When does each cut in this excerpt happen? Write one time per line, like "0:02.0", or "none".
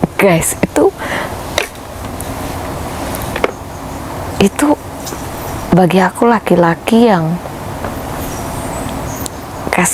none